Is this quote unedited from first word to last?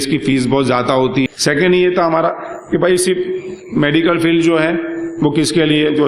no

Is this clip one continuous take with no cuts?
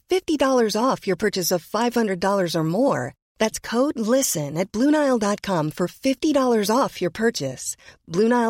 yes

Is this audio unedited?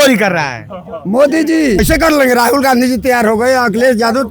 no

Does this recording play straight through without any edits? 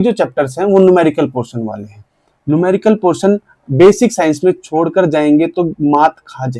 yes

